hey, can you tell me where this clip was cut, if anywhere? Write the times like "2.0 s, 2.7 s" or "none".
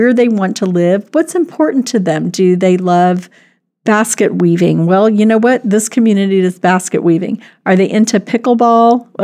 none